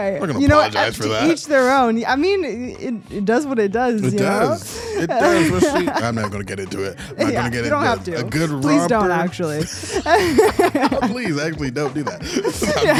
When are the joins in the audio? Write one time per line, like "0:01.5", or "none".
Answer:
none

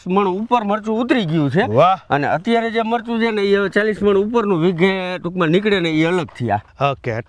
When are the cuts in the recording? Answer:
none

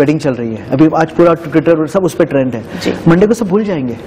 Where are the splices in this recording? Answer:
none

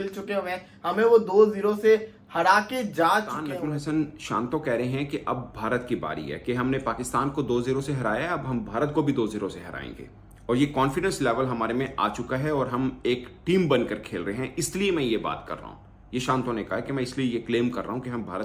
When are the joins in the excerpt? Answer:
0:03.5

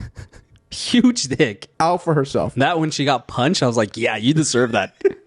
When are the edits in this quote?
0:01.6

